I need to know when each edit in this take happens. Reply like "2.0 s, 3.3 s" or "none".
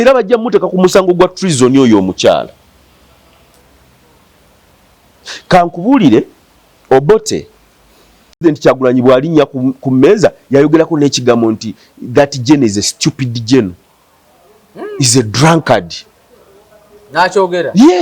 8.4 s